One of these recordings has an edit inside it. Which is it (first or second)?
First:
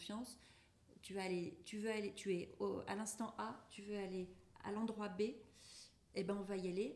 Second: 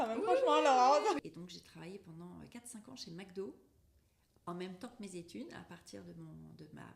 second